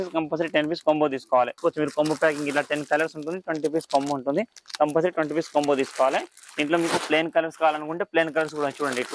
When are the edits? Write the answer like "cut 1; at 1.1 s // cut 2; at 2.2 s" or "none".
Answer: cut 1; at 1.6 s